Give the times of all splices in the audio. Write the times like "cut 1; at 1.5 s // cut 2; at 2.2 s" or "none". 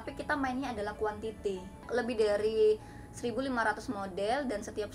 cut 1; at 1.9 s